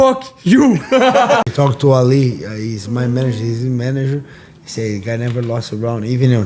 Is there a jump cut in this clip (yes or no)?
yes